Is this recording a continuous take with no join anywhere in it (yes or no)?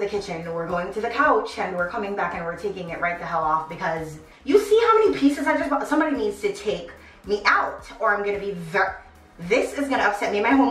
no